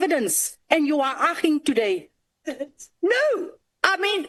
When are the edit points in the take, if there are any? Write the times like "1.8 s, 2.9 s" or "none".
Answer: none